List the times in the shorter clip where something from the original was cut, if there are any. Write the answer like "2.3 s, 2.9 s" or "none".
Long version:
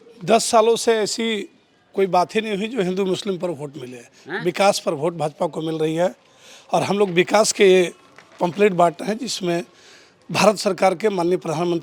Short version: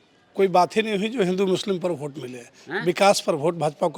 none

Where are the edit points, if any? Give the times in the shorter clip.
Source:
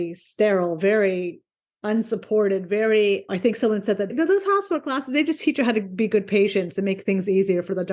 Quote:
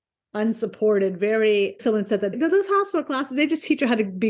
1.8 s

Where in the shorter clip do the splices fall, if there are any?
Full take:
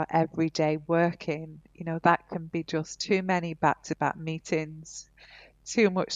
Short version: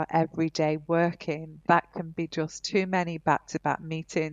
1.5 s

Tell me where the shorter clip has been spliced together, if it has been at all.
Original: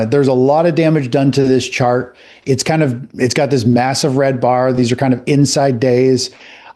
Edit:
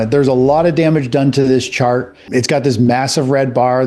2.2 s

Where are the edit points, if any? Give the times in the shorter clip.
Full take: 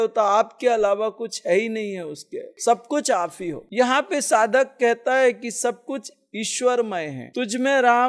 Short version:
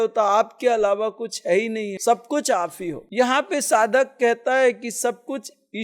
1.9 s

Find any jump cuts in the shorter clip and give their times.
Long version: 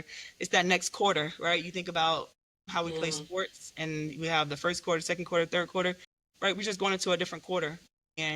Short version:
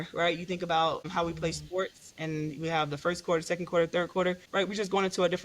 1.1 s, 4.4 s

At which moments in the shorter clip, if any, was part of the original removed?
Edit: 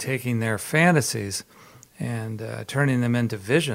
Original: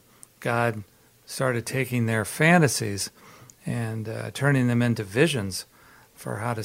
none

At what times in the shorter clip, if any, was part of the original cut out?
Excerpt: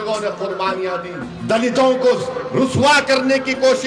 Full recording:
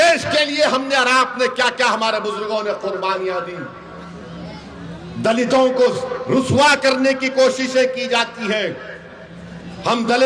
1.3 s

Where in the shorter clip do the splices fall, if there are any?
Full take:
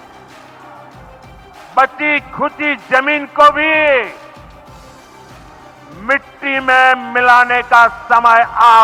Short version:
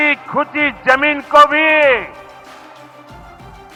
none

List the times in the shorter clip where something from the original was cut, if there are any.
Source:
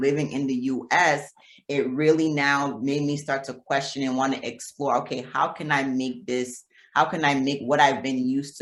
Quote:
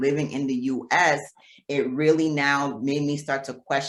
none

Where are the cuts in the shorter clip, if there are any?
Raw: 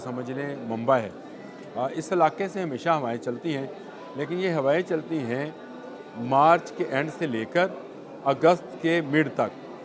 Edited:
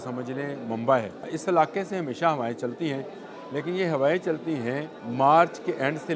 1.3 s, 5.0 s

